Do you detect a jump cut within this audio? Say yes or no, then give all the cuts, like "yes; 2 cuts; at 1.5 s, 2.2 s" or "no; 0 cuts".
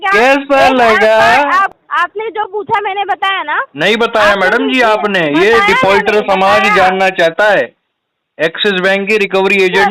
yes; 1 cut; at 1.7 s